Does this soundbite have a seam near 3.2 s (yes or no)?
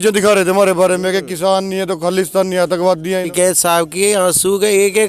yes